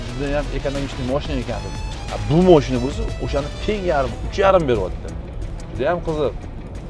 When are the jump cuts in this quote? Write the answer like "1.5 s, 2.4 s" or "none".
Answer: none